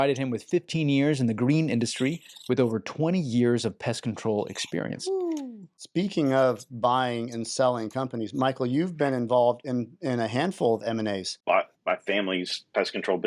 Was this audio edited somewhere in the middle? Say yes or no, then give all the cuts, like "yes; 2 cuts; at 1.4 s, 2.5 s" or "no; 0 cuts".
yes; 2 cuts; at 5.8 s, 11.3 s